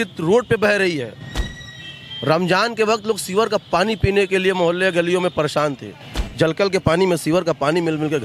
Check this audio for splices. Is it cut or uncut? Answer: uncut